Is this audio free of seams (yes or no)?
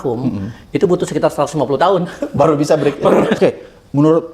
no